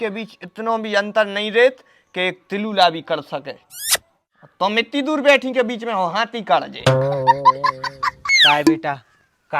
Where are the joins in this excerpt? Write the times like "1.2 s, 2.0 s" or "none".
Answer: 8.3 s